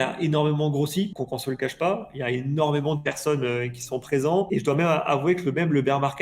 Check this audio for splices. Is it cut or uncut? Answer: cut